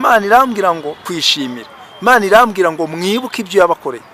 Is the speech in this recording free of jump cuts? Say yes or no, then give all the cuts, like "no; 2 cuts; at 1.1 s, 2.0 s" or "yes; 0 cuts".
no; 1 cut; at 1.2 s